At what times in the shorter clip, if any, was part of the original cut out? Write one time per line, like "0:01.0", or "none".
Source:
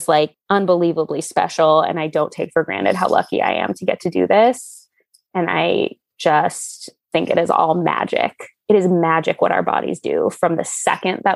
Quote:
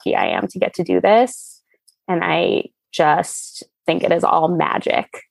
none

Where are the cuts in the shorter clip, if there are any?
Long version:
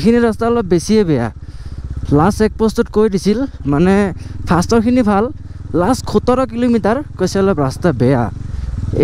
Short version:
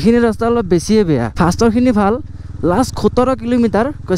0:01.3

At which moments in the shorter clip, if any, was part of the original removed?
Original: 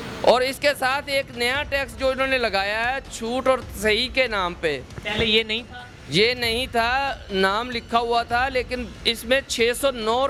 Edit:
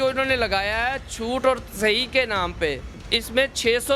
0:03.0

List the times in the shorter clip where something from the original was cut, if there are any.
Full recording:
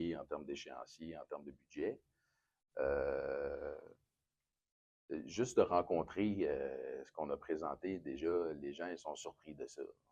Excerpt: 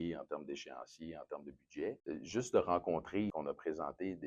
0:02.0
0:03.3

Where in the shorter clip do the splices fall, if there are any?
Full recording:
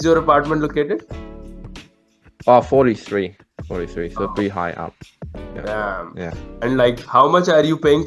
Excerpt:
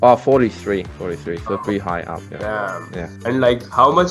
0:00.9
0:02.3
0:03.1

